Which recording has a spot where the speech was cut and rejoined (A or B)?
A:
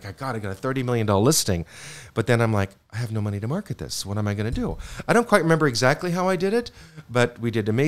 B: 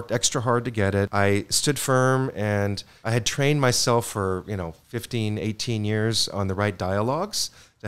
B